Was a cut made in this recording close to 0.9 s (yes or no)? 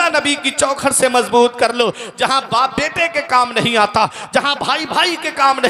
no